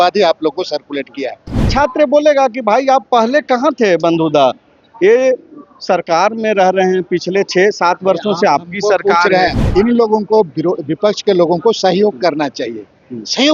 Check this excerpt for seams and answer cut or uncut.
cut